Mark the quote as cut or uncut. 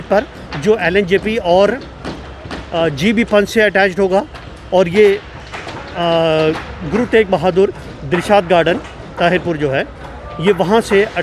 uncut